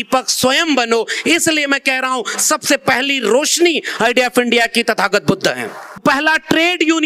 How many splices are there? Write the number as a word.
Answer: one